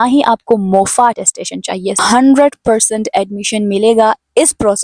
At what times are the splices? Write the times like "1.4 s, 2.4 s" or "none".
2.0 s